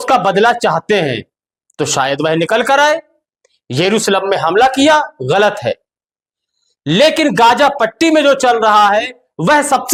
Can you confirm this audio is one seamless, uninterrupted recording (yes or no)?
yes